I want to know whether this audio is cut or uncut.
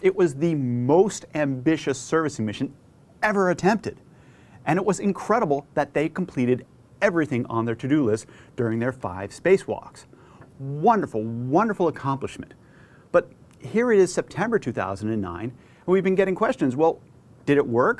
cut